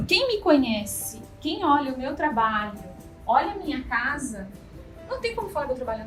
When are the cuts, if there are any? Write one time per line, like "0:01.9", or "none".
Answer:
none